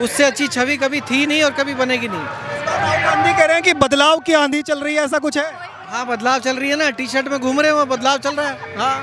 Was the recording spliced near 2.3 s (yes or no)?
no